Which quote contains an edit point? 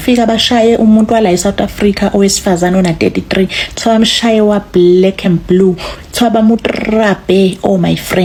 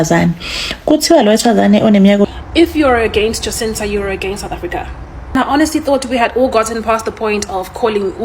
second; 2 cuts; at 2.2 s, 5.3 s

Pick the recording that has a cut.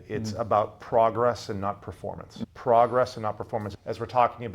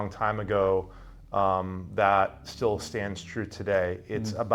first; 2 cuts; at 2.3 s, 3.7 s

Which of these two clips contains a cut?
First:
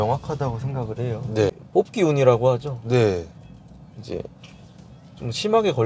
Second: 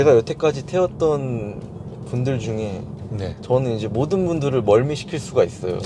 first; 1 cut; at 1.6 s

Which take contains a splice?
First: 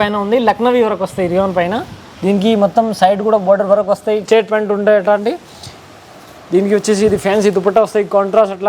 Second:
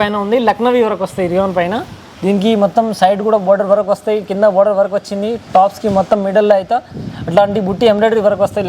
first; 1 cut; at 4.2 s

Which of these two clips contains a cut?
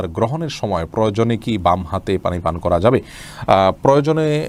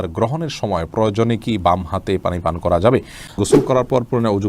second; 1 cut; at 3.4 s

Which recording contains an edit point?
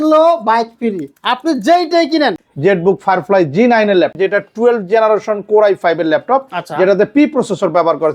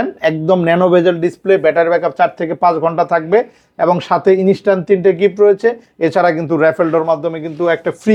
first; 2 cuts; at 2.4 s, 4.1 s

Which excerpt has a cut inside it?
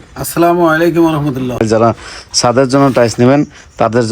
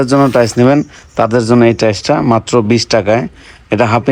first; 1 cut; at 1.6 s

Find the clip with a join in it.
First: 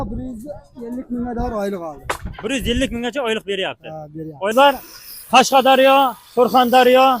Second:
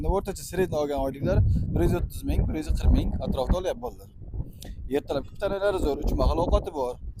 first; 1 cut; at 4.5 s

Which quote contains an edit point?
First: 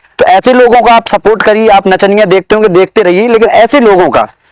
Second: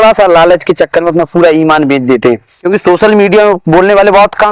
second; 1 cut; at 2.5 s

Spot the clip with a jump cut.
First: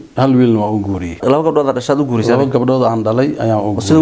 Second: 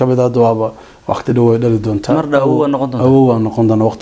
first; 1 cut; at 1.2 s

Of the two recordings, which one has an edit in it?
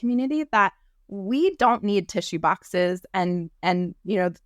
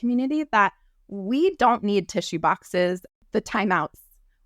second; 1 cut; at 3.1 s

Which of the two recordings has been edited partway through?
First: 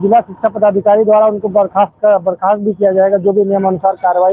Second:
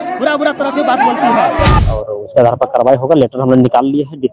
second; 1 cut; at 1.8 s

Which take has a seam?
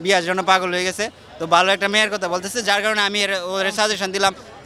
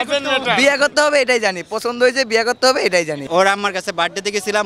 second; 1 cut; at 3.2 s

